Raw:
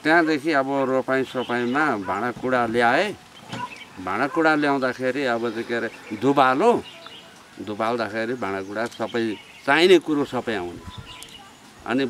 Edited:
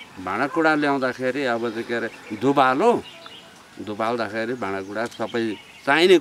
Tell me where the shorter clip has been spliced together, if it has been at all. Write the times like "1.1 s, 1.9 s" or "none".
none